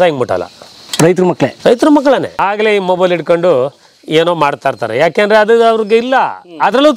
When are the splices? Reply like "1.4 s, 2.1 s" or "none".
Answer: 2.3 s

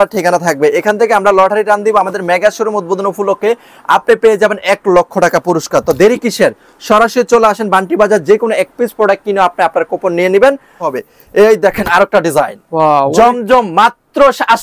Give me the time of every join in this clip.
10.9 s

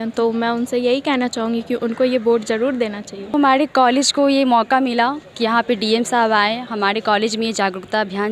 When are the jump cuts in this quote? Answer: 3.3 s

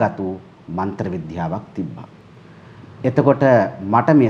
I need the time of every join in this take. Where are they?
none

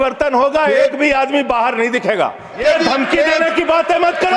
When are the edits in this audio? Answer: 2.6 s

